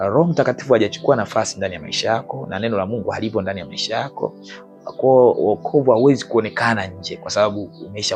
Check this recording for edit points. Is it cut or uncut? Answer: uncut